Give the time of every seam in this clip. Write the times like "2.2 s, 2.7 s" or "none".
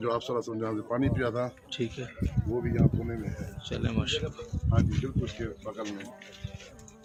none